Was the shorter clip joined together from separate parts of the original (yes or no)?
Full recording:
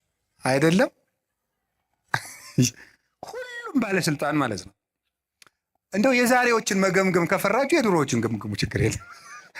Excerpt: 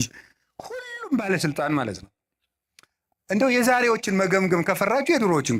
no